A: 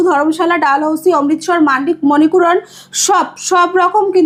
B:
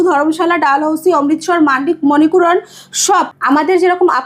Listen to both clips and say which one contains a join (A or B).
B